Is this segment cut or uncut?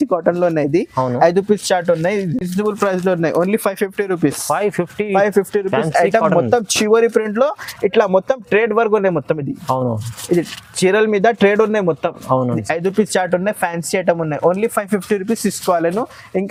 uncut